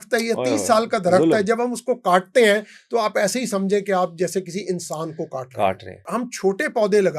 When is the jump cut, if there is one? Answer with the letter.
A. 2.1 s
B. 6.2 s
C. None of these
B